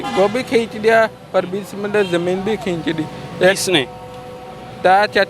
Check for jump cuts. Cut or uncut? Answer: uncut